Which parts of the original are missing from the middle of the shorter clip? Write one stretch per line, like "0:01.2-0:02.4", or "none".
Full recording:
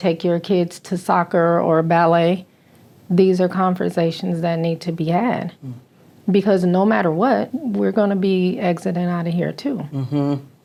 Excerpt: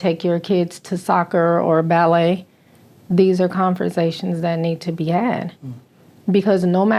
none